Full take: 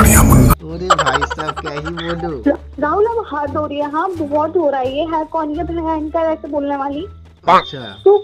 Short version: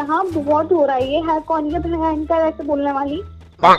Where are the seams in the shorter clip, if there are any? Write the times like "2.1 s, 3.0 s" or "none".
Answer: none